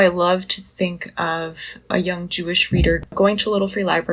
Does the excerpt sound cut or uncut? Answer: uncut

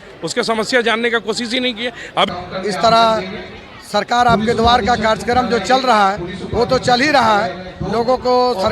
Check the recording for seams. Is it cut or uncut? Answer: cut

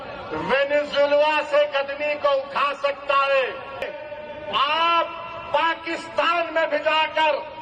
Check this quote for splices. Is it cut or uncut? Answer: cut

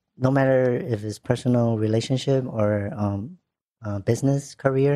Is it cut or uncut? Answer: uncut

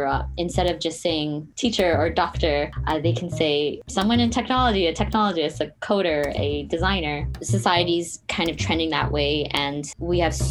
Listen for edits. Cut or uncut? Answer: cut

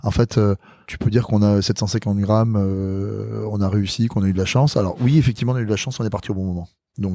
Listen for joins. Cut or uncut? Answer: cut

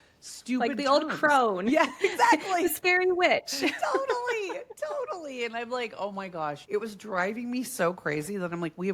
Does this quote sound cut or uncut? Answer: cut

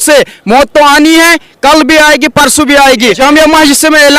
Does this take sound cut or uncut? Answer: cut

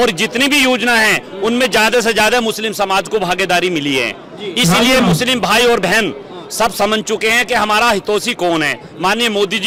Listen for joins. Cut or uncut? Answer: uncut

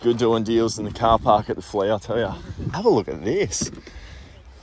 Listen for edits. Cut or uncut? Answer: cut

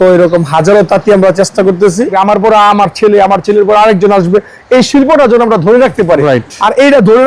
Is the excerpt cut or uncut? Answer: cut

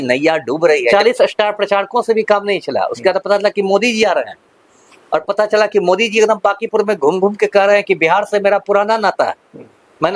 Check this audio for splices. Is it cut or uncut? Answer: cut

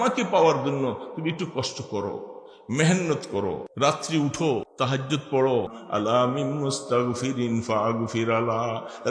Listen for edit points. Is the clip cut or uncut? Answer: cut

